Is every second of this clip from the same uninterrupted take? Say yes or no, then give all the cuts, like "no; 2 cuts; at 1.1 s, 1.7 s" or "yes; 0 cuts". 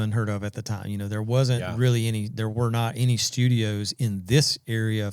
yes; 0 cuts